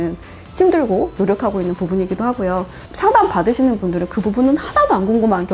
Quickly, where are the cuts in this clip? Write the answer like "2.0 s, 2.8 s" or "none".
2.8 s